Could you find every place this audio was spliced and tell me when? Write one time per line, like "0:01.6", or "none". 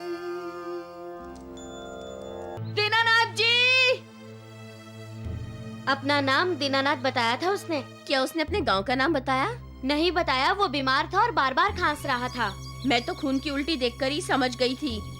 0:02.6